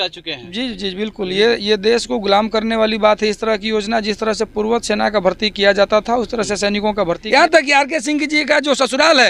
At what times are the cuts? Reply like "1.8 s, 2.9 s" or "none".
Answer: 7.2 s

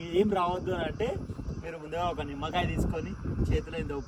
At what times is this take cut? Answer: none

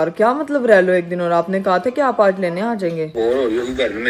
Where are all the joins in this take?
3.1 s

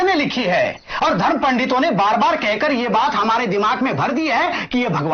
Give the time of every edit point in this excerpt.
none

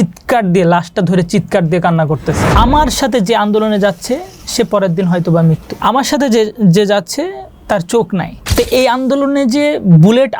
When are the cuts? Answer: 2.4 s, 5.7 s, 8.4 s

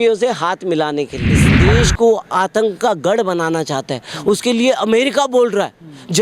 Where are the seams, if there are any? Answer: 1.5 s

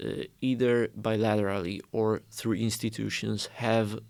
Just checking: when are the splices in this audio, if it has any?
none

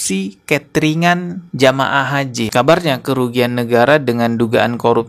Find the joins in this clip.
2.5 s

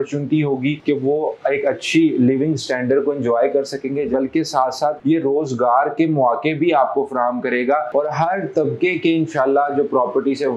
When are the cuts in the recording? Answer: 0.8 s, 4.1 s, 5.0 s

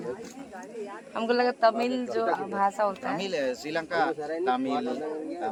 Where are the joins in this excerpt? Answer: none

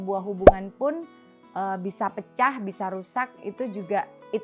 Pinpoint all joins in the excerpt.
none

